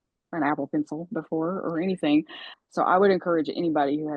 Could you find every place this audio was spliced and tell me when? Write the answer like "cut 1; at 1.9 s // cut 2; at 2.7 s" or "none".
cut 1; at 2.4 s